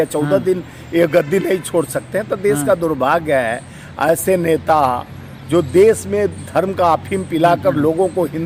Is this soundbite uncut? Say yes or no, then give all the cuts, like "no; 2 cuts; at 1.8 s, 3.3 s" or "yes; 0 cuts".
yes; 0 cuts